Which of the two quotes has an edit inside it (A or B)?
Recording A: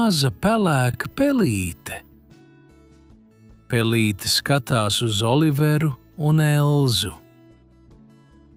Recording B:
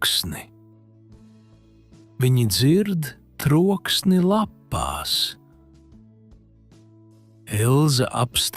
B